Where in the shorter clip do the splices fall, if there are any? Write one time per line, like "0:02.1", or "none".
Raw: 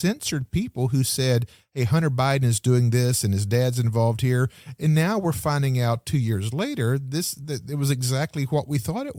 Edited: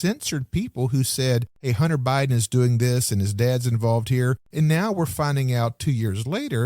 0:01.5
0:04.4